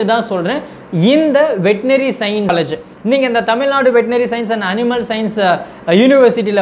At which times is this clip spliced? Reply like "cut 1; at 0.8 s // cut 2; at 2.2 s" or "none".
cut 1; at 2.5 s